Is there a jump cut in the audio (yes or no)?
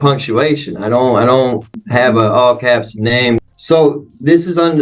yes